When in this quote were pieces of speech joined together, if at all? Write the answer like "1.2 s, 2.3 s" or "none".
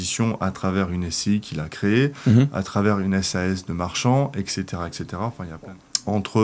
5.5 s